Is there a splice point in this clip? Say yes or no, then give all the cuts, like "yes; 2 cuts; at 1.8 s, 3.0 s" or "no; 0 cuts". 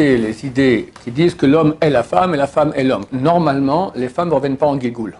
yes; 2 cuts; at 0.9 s, 3.1 s